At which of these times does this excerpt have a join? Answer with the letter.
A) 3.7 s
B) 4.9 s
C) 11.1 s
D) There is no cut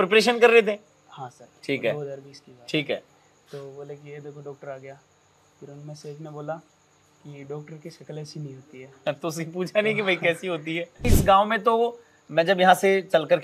C